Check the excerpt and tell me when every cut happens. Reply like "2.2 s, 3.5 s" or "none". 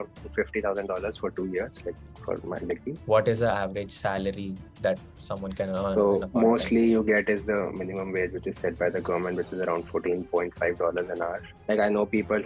2.9 s, 11.5 s